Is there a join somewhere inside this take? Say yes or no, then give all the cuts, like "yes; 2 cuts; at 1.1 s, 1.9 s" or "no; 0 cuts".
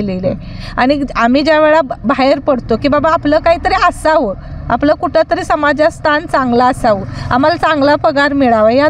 no; 0 cuts